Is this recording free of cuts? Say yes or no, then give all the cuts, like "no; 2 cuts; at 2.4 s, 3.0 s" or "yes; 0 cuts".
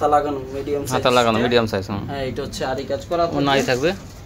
yes; 0 cuts